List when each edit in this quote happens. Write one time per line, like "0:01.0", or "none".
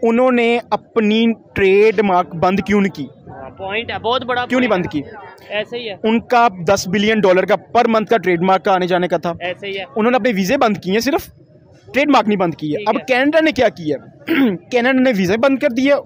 none